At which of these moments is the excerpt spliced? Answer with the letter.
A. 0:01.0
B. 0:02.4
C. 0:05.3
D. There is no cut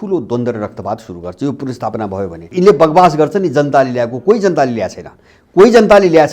B